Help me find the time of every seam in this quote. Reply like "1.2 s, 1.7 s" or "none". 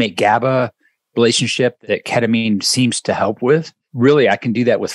1.8 s, 3.8 s